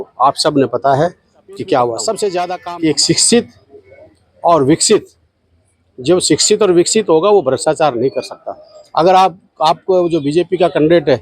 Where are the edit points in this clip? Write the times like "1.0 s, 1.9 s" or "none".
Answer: 2.6 s